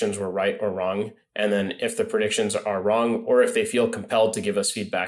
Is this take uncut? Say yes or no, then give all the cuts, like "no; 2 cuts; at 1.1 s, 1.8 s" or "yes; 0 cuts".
yes; 0 cuts